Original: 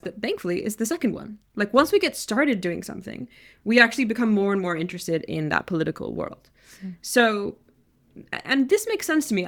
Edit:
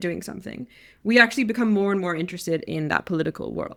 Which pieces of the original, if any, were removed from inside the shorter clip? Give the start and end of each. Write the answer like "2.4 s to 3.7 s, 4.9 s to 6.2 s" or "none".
none

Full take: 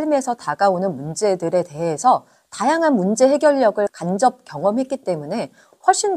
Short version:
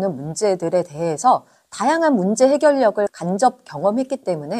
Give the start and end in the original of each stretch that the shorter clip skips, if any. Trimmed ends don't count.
none

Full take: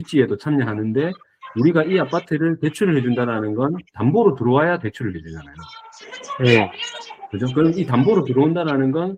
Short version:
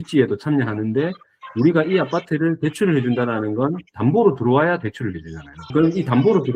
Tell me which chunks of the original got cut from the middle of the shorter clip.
5.5 s to 7.3 s

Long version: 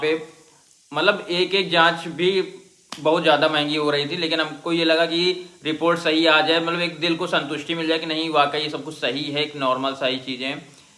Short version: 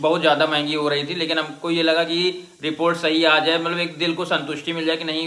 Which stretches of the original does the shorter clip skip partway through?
none

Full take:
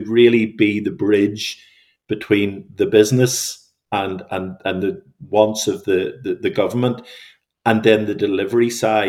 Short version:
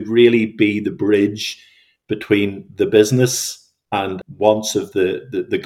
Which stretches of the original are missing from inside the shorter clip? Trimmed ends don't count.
4.2 s to 5.1 s

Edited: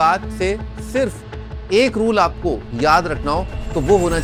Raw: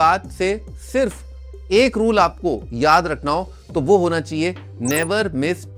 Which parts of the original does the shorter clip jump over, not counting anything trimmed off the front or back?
none

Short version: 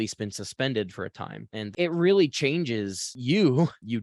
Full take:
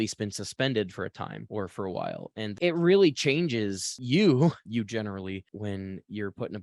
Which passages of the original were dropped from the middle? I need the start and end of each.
1.4 s to 2.3 s

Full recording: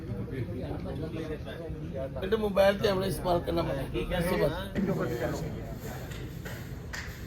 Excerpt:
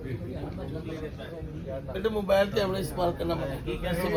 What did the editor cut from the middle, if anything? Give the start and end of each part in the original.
none

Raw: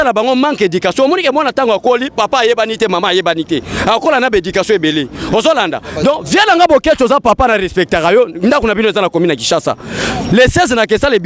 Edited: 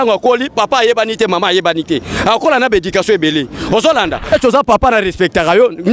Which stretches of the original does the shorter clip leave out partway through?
5.9 s to 6.8 s

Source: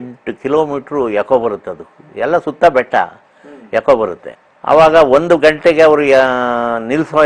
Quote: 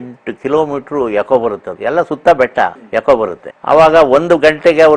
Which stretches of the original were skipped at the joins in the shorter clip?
1.7 s to 2.1 s, 3.2 s to 3.6 s, 4.3 s to 4.5 s

